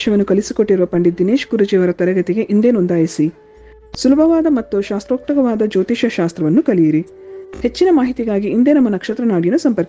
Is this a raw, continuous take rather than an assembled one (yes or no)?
yes